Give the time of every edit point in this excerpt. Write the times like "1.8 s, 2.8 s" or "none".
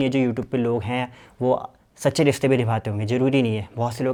none